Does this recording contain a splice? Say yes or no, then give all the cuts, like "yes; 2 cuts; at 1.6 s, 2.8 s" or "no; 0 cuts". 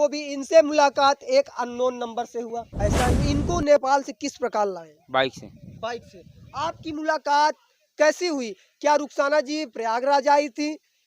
yes; 1 cut; at 3.2 s